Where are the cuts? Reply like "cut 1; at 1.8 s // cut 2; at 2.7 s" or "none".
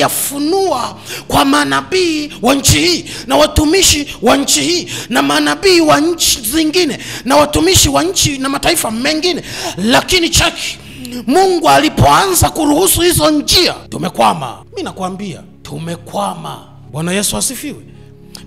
cut 1; at 13.9 s // cut 2; at 14.6 s // cut 3; at 15.5 s // cut 4; at 16.7 s